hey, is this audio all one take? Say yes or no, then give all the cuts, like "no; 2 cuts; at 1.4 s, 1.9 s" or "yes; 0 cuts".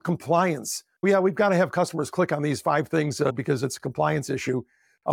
no; 1 cut; at 3.3 s